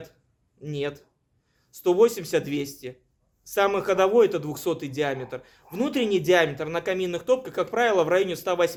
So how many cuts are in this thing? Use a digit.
0